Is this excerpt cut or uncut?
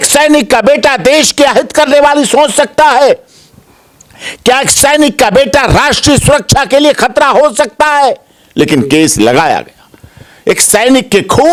uncut